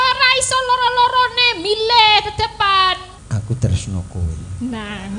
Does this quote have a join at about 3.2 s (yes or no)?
yes